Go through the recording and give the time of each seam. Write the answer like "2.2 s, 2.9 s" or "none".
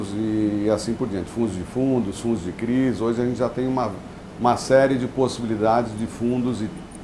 none